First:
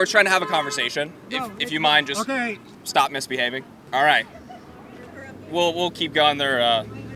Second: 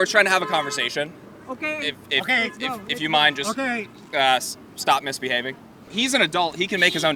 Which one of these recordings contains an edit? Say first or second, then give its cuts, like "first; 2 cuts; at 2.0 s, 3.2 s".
first; 3 cuts; at 1.3 s, 2.7 s, 3.8 s